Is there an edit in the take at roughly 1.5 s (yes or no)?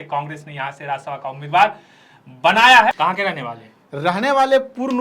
no